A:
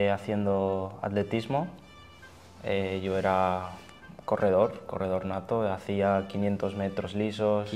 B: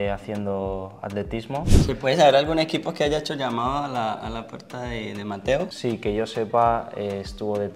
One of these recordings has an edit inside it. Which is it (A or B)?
B